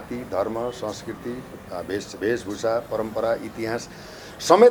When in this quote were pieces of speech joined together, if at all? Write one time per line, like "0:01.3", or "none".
none